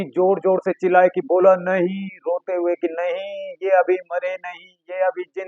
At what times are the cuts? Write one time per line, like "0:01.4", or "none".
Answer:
none